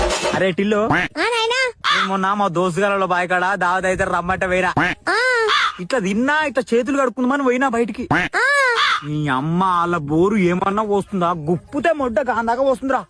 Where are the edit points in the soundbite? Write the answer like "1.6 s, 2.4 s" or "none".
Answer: none